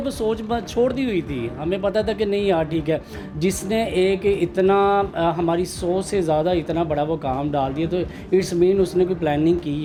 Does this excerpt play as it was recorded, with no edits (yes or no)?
yes